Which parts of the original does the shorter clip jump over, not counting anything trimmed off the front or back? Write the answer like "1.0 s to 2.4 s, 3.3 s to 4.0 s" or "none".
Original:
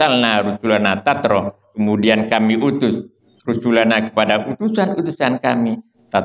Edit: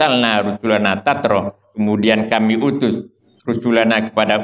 none